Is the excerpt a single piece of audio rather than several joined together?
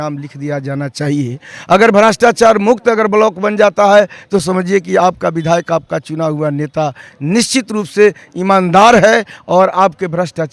yes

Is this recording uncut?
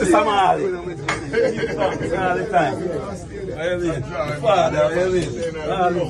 yes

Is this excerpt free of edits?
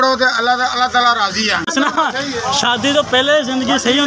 no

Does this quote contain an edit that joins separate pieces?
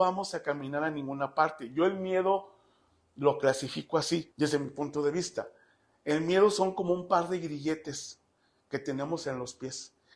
yes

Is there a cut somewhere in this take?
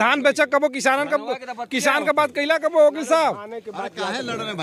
no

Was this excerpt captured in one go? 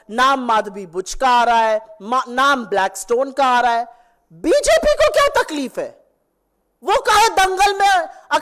yes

